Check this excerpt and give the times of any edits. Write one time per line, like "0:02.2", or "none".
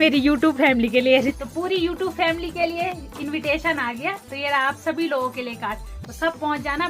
0:01.3
0:02.8